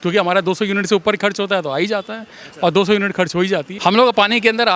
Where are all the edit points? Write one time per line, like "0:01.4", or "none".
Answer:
0:03.7